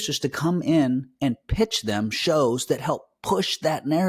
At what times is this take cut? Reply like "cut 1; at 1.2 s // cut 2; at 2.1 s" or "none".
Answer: none